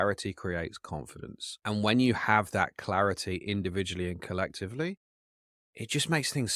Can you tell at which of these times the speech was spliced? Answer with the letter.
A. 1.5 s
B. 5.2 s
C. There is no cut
A